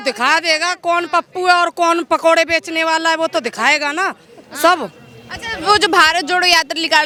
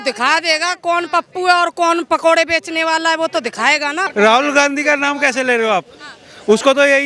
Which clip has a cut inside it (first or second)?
second